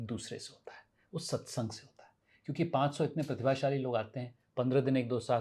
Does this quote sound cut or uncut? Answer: uncut